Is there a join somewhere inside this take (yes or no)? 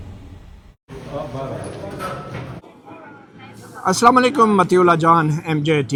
no